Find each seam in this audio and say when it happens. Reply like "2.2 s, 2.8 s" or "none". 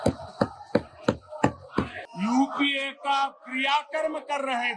2.0 s